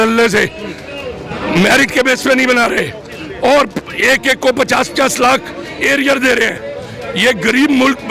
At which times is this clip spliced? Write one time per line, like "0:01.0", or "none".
none